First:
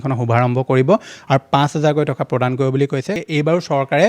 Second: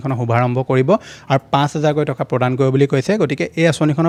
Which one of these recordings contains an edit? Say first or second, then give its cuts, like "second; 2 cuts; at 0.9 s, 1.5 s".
first; 1 cut; at 3.1 s